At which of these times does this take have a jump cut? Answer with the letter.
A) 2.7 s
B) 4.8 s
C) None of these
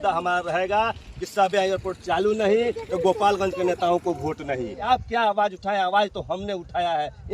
B